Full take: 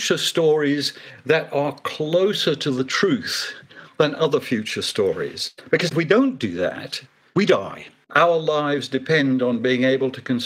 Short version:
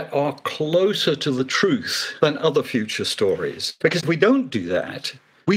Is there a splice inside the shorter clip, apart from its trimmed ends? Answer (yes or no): yes